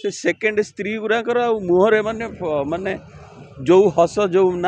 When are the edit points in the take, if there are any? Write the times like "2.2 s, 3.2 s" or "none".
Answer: none